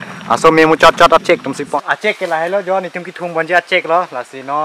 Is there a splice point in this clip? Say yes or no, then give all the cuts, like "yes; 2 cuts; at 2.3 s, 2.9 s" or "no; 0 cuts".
yes; 1 cut; at 1.6 s